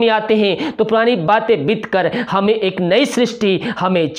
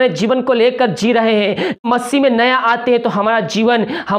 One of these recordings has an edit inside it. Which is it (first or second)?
second